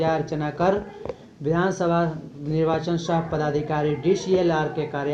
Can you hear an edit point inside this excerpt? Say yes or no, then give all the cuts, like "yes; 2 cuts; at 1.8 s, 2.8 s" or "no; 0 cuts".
no; 0 cuts